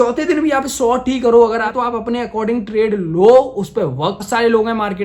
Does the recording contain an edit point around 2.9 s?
no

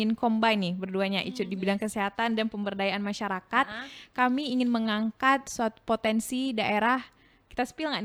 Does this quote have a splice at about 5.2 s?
no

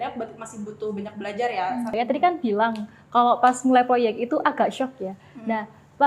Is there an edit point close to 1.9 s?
yes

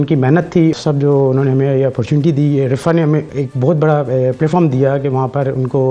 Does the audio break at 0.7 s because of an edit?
yes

